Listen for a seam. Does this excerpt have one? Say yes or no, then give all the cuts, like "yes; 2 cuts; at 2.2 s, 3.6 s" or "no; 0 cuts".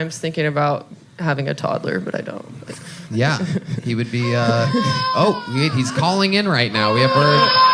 no; 0 cuts